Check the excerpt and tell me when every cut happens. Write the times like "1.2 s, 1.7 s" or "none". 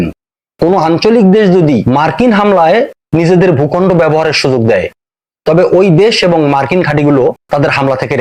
none